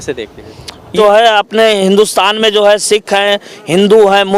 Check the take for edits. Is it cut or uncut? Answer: cut